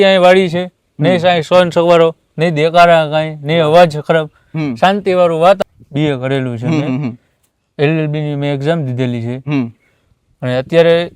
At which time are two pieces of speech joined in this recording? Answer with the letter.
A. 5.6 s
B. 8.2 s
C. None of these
A